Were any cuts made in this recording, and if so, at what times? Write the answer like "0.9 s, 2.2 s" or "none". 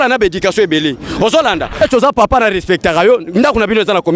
1.8 s